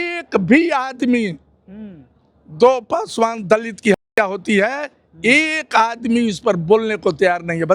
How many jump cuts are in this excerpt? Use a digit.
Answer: 0